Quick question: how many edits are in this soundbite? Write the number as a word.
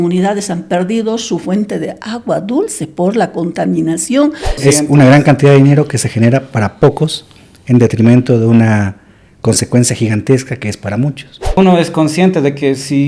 two